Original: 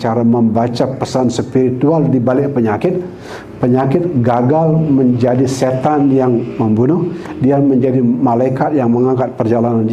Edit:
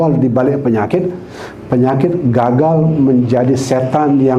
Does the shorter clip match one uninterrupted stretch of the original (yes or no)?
yes